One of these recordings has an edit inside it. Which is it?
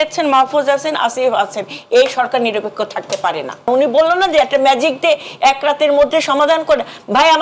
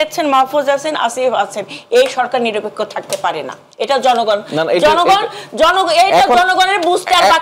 first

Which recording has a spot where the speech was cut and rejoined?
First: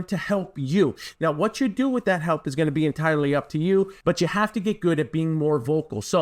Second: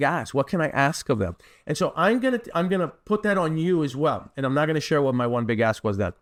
first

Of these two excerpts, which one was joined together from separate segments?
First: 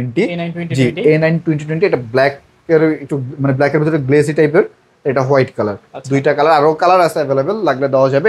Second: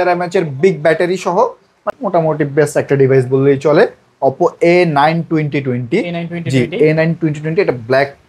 second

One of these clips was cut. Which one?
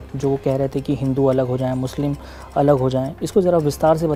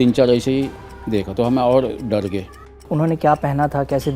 second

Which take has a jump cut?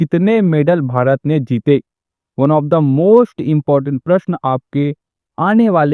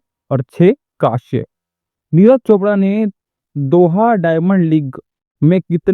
second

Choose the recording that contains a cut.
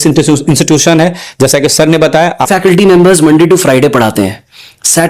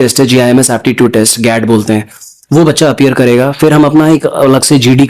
first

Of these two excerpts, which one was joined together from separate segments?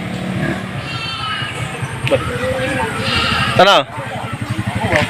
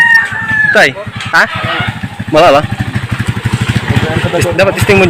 first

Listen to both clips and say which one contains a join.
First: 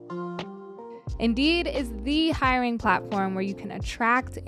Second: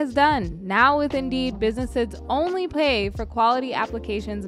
first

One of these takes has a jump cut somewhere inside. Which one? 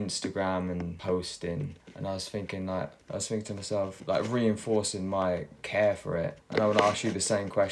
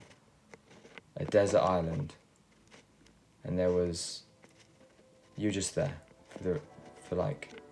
first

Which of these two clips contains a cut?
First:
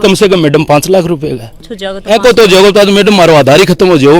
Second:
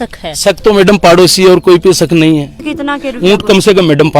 second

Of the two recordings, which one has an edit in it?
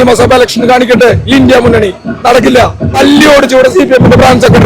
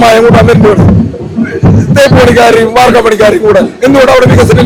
first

